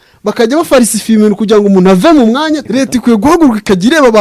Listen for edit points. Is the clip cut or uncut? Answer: cut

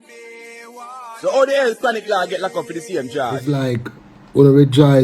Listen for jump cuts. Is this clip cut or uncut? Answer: cut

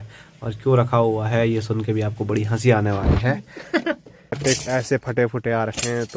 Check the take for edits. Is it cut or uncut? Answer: cut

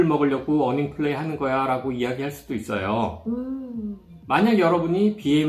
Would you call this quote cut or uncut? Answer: uncut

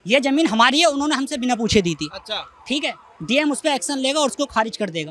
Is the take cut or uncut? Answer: uncut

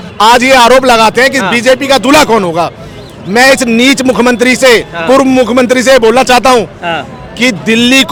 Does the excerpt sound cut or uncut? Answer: uncut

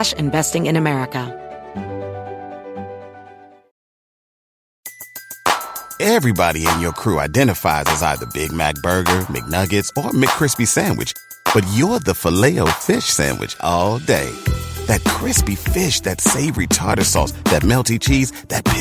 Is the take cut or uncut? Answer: cut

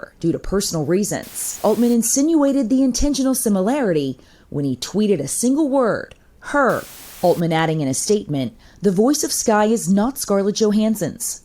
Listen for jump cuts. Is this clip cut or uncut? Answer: cut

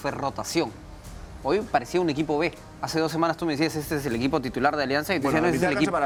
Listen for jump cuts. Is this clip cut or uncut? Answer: uncut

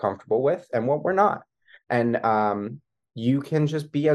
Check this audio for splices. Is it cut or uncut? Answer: uncut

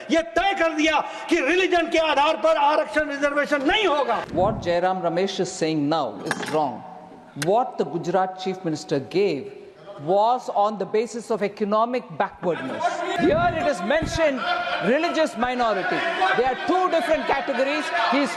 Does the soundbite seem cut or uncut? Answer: cut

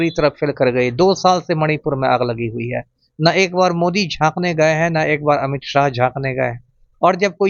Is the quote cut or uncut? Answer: uncut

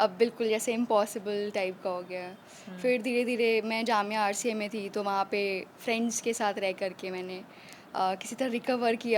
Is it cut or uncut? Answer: uncut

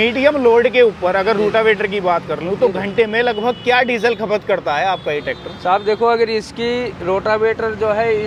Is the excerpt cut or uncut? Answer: uncut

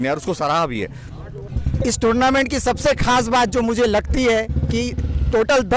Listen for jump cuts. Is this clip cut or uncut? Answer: uncut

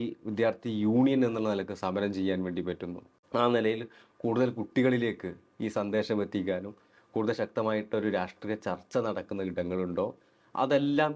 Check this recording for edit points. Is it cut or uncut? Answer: uncut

